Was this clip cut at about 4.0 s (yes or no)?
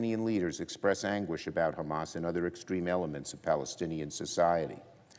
yes